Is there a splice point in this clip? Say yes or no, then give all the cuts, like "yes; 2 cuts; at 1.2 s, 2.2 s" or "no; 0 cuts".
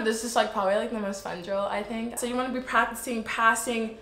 yes; 1 cut; at 2.2 s